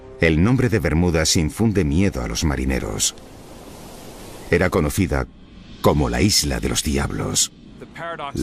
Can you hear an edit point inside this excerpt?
no; 0 cuts

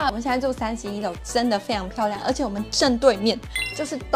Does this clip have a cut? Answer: no; 0 cuts

